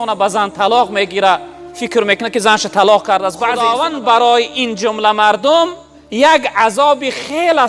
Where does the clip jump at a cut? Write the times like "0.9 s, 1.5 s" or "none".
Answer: 3.7 s